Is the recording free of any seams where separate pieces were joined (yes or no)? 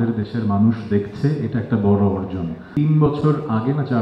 no